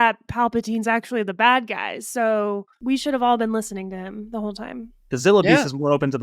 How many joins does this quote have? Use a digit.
1